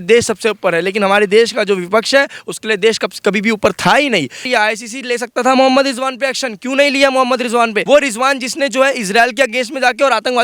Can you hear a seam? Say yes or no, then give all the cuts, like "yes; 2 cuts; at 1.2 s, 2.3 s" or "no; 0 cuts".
yes; 2 cuts; at 4.4 s, 7.8 s